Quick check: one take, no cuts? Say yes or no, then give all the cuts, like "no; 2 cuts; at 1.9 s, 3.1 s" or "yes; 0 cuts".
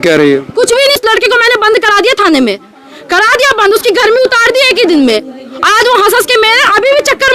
no; 1 cut; at 1.0 s